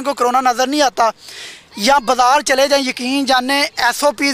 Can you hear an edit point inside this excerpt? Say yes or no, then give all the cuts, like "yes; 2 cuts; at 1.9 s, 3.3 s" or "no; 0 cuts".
no; 0 cuts